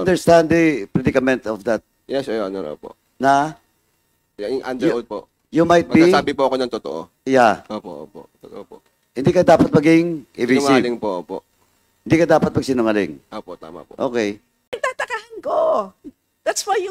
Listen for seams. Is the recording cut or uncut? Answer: cut